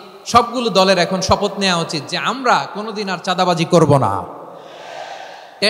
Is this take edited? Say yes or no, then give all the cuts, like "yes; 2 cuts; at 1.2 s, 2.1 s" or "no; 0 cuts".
no; 0 cuts